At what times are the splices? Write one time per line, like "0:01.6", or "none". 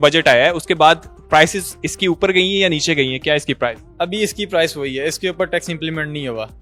none